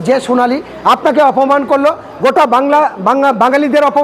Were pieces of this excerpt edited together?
no; 0 cuts

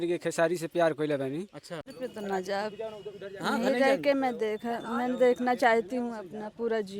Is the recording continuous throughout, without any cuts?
no; 1 cut; at 1.9 s

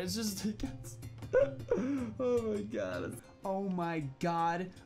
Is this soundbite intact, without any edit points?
no; 1 cut; at 3.2 s

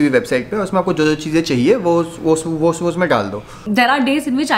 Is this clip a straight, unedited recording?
no; 1 cut; at 3.6 s

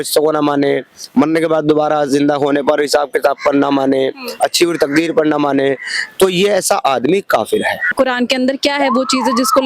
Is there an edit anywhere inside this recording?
yes; 1 cut; at 7.8 s

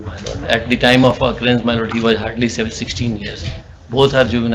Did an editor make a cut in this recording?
no; 0 cuts

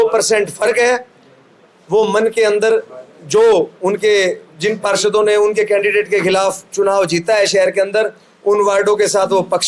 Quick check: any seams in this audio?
no; 0 cuts

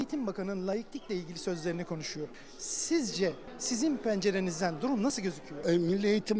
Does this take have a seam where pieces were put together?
yes; 3 cuts; at 2.4 s, 3.5 s, 5.5 s

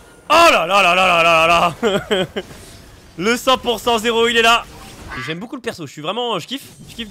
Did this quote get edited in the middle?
yes; 1 cut; at 5.2 s

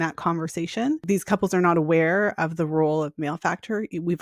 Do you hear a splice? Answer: yes; 1 cut; at 1.0 s

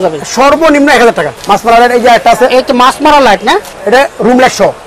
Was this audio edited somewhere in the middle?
yes; 2 cuts; at 1.3 s, 3.7 s

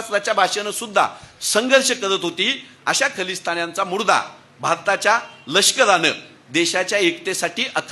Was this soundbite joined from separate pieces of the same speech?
no; 0 cuts

